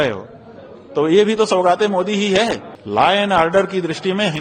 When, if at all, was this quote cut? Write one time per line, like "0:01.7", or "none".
0:02.7